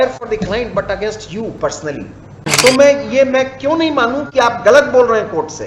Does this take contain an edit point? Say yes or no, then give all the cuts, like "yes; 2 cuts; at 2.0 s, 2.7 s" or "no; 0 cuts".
yes; 1 cut; at 2.5 s